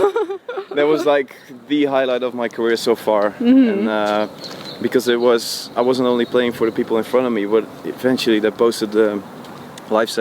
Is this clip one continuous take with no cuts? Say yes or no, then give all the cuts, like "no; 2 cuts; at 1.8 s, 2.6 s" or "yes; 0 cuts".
yes; 0 cuts